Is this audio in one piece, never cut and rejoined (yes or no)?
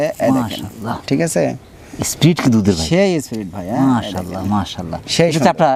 yes